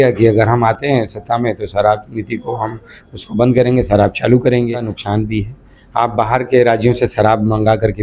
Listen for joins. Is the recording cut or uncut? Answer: cut